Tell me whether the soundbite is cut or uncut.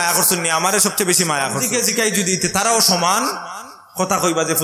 cut